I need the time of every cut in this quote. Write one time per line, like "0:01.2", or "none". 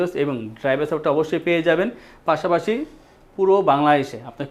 none